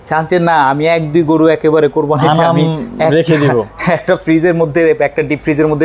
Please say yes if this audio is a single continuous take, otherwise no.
yes